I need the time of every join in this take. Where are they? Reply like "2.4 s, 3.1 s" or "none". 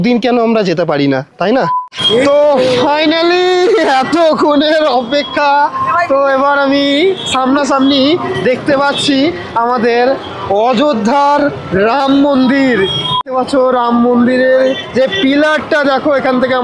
2.1 s, 13.3 s

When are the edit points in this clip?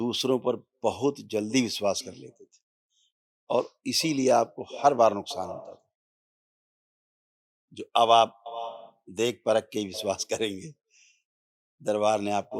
none

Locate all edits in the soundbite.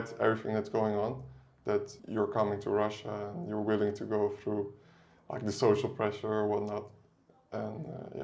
2.0 s

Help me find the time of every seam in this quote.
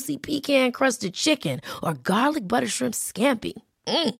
none

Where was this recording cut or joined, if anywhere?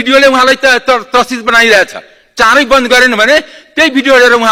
none

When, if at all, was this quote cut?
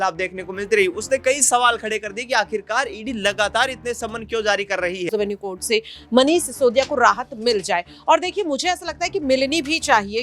5.1 s

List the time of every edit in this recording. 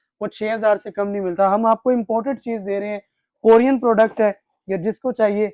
none

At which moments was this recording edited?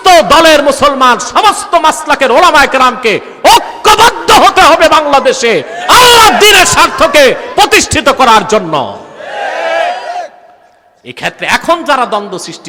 none

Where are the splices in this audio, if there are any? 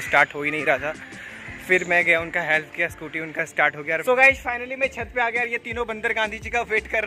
4.0 s

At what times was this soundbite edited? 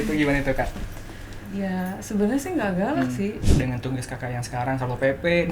3.4 s

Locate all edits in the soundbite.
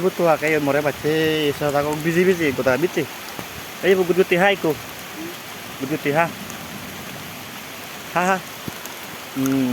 none

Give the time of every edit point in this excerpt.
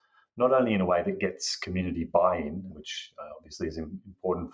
2.7 s

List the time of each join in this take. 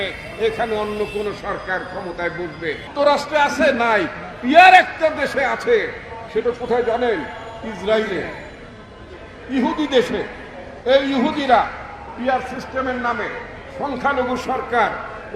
2.9 s

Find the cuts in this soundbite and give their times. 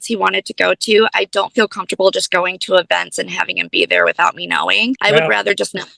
5.0 s

